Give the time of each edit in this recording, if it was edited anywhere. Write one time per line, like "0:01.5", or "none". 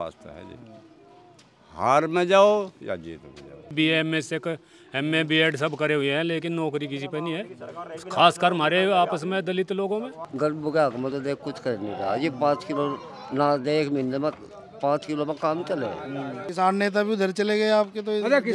0:03.7
0:10.2
0:16.4